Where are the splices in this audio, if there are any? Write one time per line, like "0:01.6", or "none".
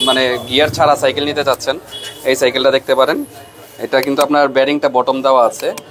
none